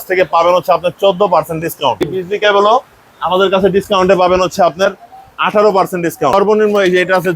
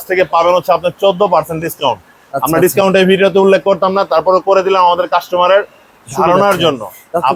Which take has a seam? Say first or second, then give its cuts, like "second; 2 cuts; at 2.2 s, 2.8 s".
first; 2 cuts; at 2.1 s, 6.3 s